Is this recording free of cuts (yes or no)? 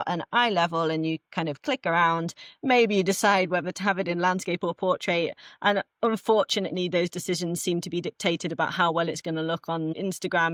yes